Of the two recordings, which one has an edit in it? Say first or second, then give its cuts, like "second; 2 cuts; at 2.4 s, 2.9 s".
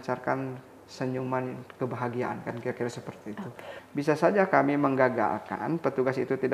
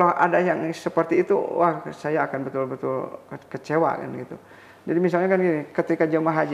first; 1 cut; at 3.7 s